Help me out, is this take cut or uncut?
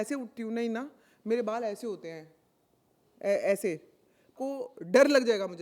cut